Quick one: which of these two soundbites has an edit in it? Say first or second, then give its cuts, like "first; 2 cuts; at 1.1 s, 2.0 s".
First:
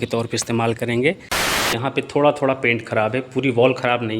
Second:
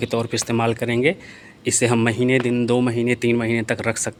first; 1 cut; at 1.8 s